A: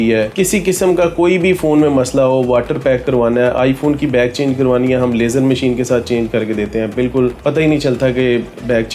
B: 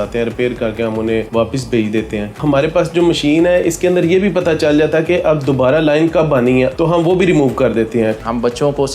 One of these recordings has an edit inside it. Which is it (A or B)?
B